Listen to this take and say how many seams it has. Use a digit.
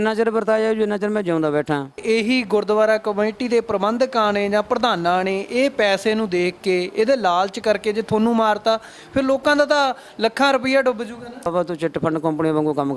2